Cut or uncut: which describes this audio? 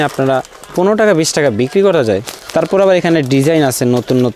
uncut